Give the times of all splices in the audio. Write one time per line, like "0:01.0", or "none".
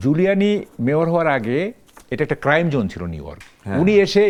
none